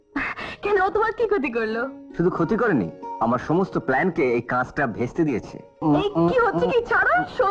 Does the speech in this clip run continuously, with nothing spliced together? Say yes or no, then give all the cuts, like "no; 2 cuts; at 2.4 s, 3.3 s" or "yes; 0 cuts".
no; 1 cut; at 5.8 s